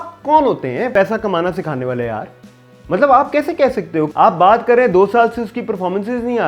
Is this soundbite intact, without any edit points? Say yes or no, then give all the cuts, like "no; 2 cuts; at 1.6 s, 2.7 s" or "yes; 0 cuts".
yes; 0 cuts